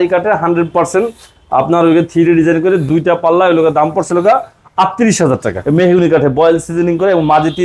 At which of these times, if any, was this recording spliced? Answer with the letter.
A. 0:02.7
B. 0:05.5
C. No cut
B